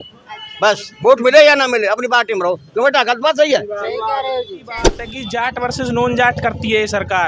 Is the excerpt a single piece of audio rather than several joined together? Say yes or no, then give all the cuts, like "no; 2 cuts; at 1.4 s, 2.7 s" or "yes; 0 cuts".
no; 1 cut; at 5.1 s